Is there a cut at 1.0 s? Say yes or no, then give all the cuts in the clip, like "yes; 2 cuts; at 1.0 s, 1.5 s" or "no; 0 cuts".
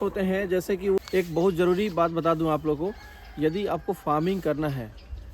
yes; 1 cut; at 1.0 s